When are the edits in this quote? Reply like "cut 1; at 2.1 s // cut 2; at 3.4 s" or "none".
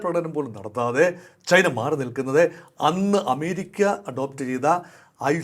none